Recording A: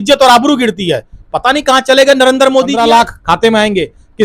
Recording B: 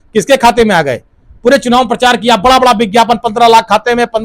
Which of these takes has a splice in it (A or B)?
A